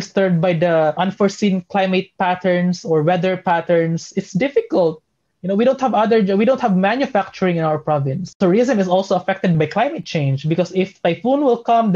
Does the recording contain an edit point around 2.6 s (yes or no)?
no